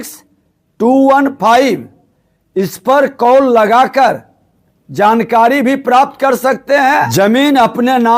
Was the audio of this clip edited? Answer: yes; 1 cut; at 7.1 s

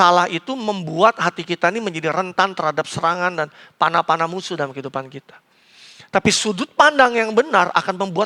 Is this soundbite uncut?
yes; 0 cuts

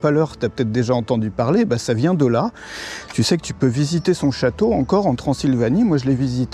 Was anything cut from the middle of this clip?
no; 0 cuts

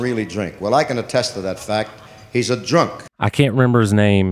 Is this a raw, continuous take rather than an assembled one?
no; 1 cut; at 3.0 s

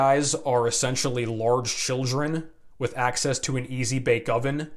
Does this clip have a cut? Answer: no; 0 cuts

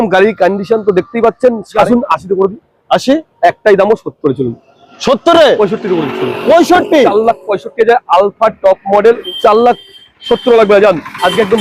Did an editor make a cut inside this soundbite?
yes; 2 cuts; at 1.7 s, 9.3 s

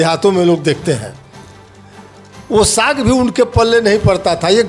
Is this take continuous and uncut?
yes; 0 cuts

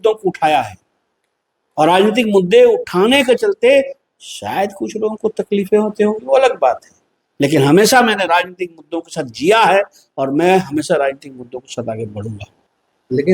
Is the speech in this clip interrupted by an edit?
no; 0 cuts

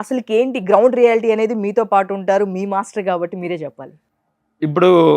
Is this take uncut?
no; 1 cut; at 4.3 s

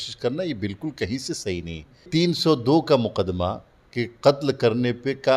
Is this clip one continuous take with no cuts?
no; 1 cut; at 2.1 s

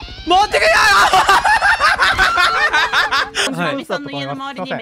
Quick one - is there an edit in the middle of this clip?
yes; 1 cut; at 3.5 s

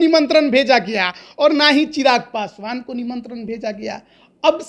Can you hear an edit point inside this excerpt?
no; 0 cuts

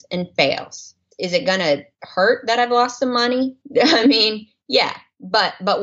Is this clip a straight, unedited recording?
no; 1 cut; at 1.1 s

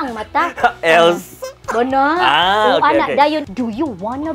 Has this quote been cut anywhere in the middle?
yes; 1 cut; at 3.5 s

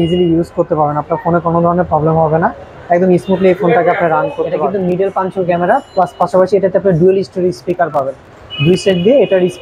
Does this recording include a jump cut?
yes; 1 cut; at 4.8 s

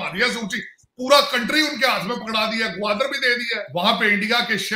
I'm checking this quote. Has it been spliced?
yes; 1 cut; at 3.6 s

